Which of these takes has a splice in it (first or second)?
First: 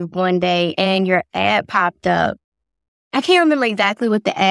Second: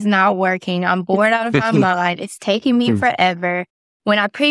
first